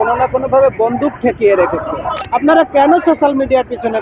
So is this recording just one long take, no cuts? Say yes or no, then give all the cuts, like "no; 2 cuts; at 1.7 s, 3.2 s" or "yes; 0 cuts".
no; 1 cut; at 2.1 s